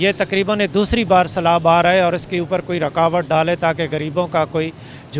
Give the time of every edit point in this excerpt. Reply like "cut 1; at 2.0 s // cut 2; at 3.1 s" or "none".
none